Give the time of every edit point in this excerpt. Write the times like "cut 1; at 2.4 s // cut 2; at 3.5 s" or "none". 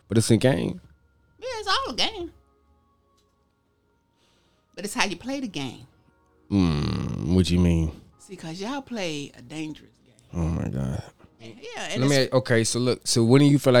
cut 1; at 11.7 s